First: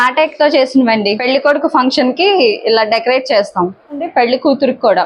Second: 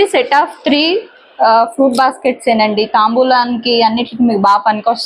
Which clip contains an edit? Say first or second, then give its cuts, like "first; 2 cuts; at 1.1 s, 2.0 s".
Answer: first; 2 cuts; at 1.2 s, 4.1 s